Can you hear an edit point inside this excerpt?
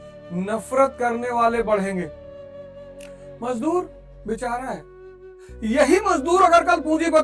yes; 2 cuts; at 2.1 s, 3.4 s

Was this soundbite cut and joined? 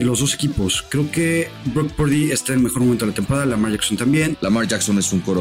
yes; 1 cut; at 4.4 s

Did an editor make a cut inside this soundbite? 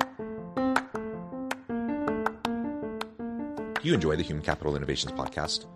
yes; 1 cut; at 3.8 s

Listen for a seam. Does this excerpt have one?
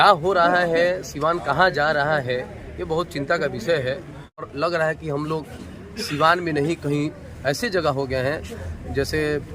yes; 1 cut; at 4.5 s

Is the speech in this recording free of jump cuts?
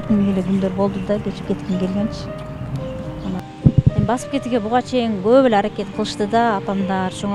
no; 1 cut; at 3.4 s

